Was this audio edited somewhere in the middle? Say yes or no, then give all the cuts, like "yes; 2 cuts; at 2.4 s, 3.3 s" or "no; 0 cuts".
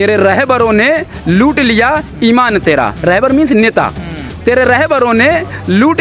no; 0 cuts